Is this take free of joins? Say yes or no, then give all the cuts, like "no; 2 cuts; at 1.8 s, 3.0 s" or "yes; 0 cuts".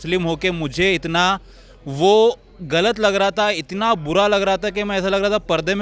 yes; 0 cuts